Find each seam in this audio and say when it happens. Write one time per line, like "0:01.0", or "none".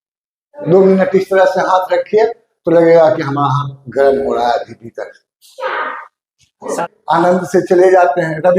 0:06.8